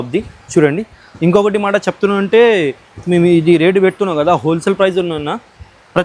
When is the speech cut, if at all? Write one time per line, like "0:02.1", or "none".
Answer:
none

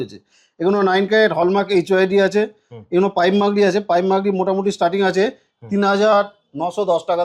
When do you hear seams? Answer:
none

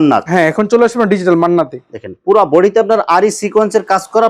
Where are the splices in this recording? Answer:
none

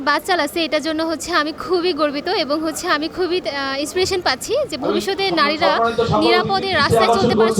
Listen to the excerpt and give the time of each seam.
none

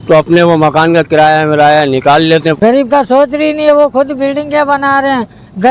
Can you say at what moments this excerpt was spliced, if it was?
0:02.6

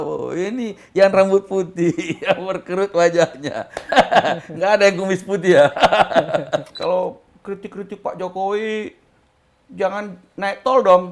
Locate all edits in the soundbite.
0:06.7

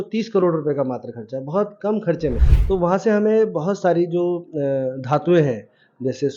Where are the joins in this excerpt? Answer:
0:02.5

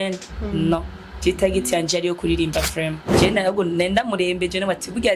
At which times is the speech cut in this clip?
0:03.1

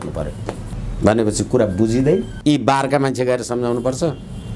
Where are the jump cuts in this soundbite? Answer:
0:02.3

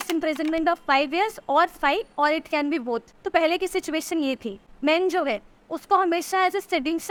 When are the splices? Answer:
none

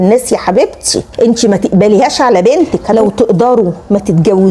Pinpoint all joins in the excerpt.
0:01.1
0:02.9

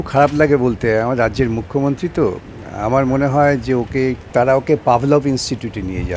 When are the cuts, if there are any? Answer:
0:04.2

